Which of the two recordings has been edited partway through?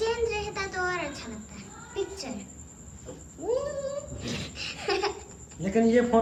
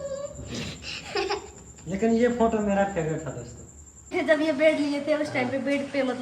second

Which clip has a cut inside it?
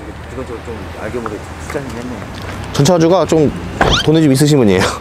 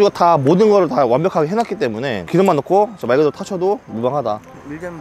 second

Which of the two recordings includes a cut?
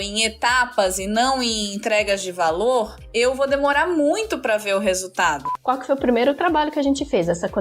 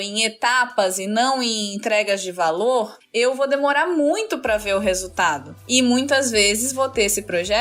first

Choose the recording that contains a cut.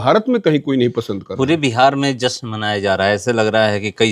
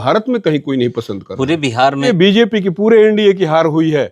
second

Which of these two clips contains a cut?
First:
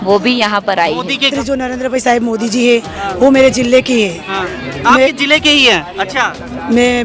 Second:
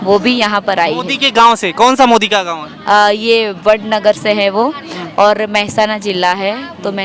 first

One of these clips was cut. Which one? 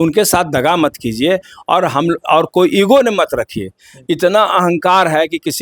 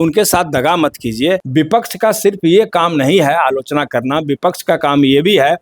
second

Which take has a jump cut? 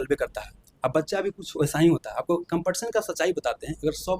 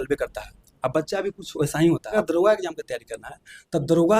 second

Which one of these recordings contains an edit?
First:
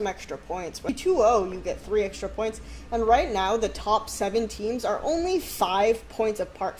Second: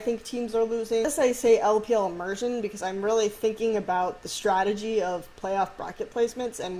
first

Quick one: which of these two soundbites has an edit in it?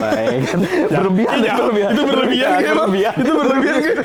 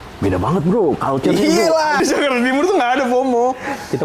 second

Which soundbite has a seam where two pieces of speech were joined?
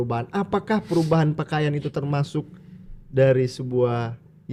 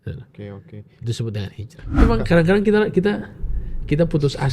second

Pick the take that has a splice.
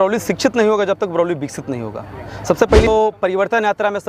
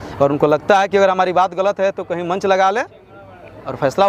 first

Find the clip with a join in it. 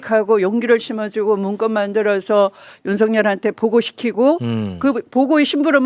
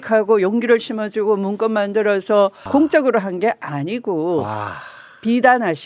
second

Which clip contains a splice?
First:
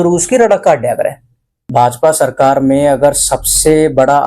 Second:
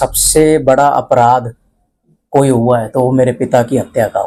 first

